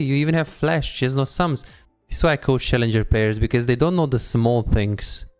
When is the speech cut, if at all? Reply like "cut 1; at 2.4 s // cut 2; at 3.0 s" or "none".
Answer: cut 1; at 1.7 s